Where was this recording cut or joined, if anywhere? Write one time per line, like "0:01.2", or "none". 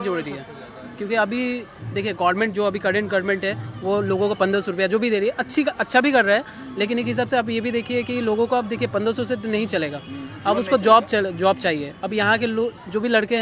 none